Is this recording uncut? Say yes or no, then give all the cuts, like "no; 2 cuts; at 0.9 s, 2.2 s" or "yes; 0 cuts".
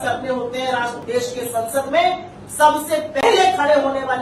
yes; 0 cuts